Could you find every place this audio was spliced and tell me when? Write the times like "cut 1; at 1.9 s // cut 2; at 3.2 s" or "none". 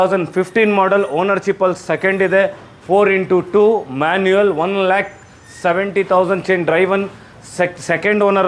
none